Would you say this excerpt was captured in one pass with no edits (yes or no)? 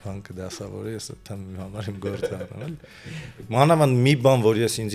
no